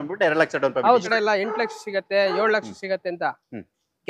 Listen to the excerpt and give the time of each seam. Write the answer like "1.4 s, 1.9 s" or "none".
1.0 s